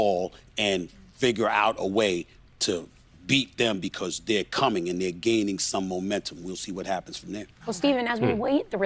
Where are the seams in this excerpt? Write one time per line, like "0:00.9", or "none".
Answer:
none